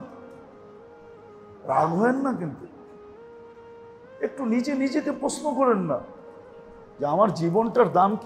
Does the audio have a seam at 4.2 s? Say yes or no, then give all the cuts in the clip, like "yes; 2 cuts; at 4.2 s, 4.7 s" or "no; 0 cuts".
yes; 2 cuts; at 2.8 s, 4.2 s